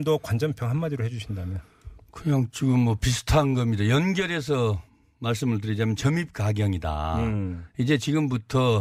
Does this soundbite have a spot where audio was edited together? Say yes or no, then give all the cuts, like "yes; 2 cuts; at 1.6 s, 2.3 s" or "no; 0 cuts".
no; 0 cuts